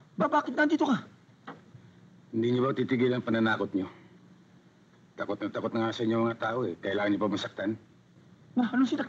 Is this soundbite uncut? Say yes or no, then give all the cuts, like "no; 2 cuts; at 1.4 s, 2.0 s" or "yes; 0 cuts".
yes; 0 cuts